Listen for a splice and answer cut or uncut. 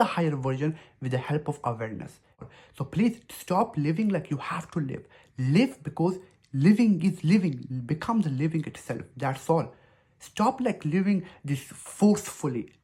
cut